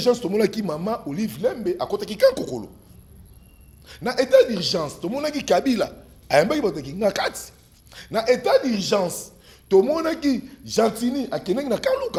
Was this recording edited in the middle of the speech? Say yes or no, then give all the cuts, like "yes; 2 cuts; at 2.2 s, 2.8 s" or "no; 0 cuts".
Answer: no; 0 cuts